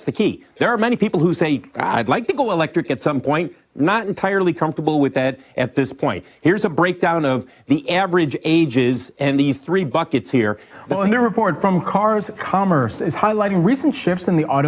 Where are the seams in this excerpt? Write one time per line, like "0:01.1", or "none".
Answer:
none

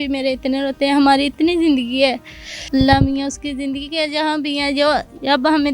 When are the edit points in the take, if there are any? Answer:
0:02.5

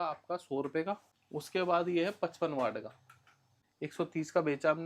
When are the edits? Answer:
0:01.1
0:03.6

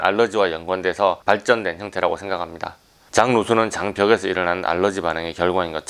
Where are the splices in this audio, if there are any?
0:02.9

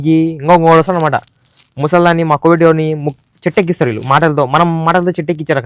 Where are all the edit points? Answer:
none

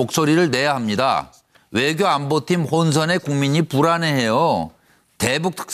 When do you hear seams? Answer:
0:01.8

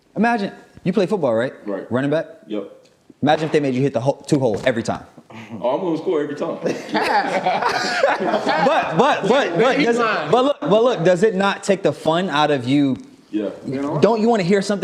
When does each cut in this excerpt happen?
none

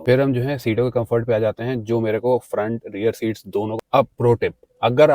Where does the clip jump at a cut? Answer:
0:03.8

